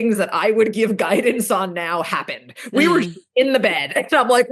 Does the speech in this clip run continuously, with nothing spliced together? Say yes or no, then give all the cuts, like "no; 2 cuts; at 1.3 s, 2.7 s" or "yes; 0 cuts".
yes; 0 cuts